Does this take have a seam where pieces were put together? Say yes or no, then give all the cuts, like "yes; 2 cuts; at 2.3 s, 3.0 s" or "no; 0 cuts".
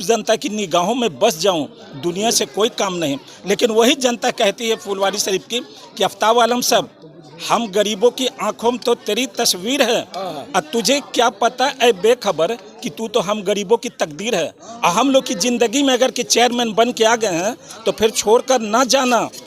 no; 0 cuts